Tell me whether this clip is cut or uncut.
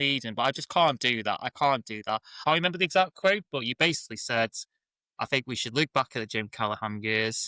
cut